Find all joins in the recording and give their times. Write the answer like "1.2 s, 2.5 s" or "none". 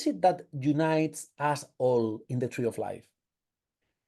none